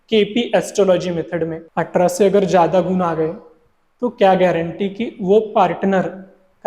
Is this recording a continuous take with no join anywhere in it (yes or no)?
no